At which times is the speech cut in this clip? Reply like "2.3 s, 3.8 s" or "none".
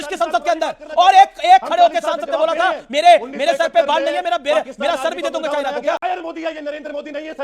6.0 s